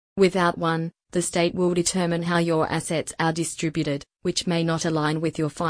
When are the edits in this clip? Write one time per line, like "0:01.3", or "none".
none